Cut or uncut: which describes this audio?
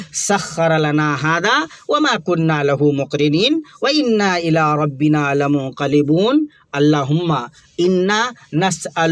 uncut